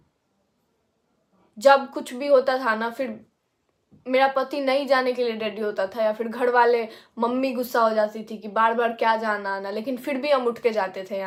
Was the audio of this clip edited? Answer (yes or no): no